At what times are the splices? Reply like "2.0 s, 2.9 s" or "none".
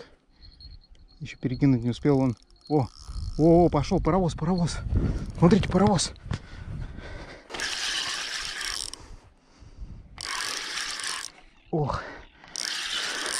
7.5 s